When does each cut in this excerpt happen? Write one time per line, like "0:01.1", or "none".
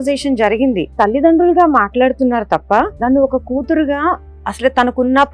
0:00.9
0:02.9